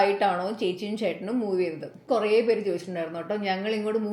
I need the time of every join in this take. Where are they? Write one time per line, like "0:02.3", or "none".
0:02.0